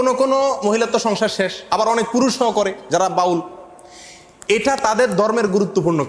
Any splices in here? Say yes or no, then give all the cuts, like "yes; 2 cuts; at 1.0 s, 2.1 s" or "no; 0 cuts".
no; 0 cuts